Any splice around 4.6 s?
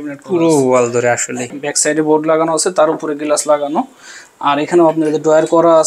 no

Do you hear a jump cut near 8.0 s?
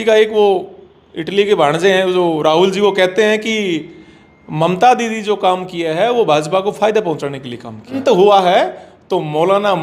yes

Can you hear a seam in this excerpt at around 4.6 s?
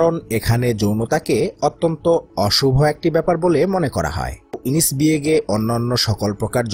yes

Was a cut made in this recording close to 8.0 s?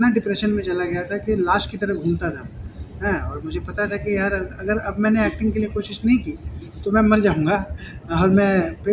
no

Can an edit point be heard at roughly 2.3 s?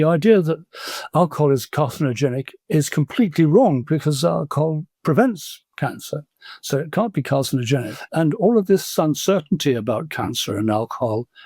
no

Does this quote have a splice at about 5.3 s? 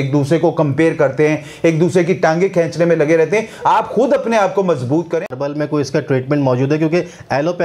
yes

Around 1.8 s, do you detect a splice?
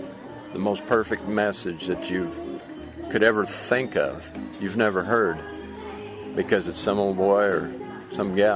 no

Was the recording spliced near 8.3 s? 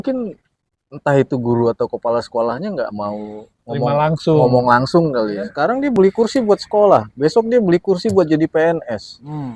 no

